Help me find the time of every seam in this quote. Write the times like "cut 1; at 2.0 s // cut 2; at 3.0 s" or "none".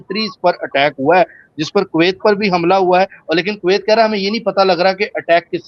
none